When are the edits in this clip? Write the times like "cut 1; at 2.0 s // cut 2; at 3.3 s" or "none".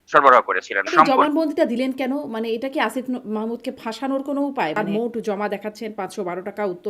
cut 1; at 0.9 s // cut 2; at 4.8 s